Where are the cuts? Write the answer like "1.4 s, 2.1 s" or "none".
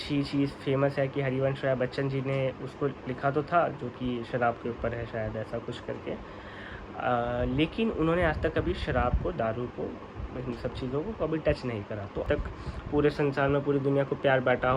12.2 s